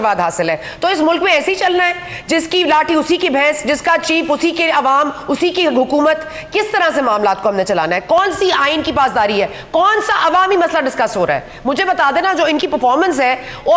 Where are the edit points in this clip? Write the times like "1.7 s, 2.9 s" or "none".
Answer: none